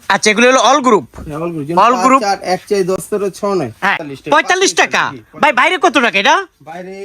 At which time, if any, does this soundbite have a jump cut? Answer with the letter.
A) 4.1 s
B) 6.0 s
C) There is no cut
A